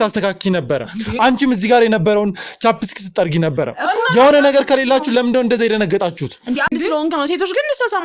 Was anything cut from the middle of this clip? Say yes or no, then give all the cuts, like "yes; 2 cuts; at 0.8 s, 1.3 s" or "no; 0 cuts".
yes; 1 cut; at 6.7 s